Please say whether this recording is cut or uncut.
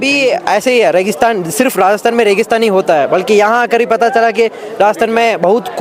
uncut